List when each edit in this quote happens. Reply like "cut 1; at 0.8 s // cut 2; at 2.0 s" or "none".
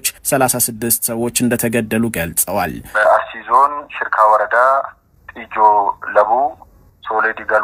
cut 1; at 2.8 s

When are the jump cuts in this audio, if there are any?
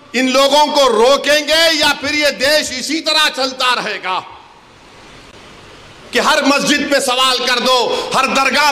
none

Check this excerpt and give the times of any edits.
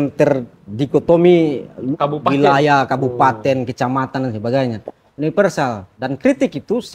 cut 1; at 5.9 s

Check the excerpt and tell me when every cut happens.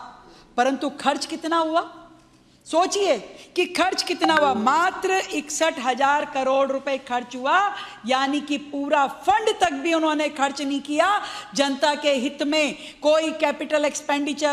cut 1; at 4.6 s // cut 2; at 10.6 s

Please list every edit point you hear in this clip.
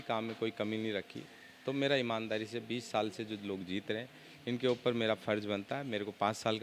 none

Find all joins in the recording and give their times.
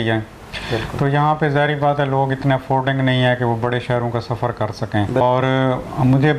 cut 1; at 5.2 s

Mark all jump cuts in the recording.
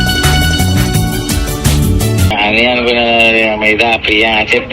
cut 1; at 2.3 s

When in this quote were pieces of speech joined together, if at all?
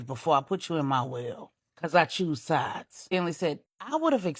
cut 1; at 3.3 s

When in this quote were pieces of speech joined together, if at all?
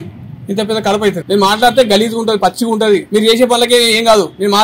cut 1; at 1.2 s // cut 2; at 3.1 s

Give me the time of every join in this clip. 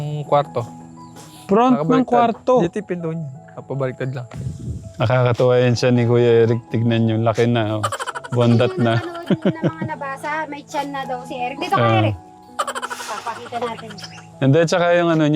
cut 1; at 4.3 s

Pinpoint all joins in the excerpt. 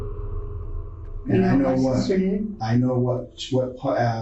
none

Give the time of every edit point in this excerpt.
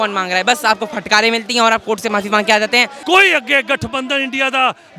cut 1; at 2.9 s

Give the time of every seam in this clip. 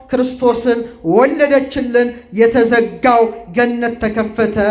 none

